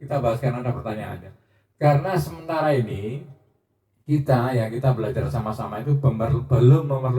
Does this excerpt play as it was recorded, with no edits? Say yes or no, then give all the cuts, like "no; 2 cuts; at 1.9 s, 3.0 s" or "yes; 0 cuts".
yes; 0 cuts